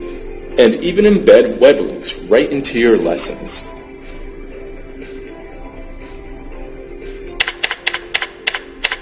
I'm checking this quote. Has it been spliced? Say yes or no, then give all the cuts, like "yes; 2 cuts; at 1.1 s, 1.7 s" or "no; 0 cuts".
yes; 1 cut; at 5.1 s